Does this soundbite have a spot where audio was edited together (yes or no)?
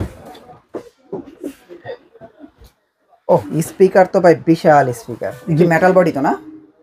yes